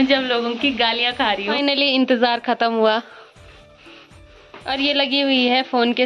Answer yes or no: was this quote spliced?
no